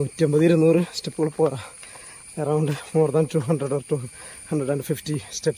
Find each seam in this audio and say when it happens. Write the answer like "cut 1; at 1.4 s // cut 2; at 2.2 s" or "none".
none